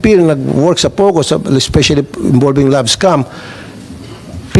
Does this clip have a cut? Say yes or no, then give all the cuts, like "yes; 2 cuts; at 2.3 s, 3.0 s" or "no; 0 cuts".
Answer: no; 0 cuts